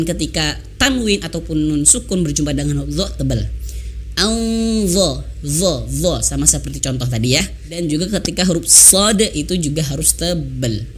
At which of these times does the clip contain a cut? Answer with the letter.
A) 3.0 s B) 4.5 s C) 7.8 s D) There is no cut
C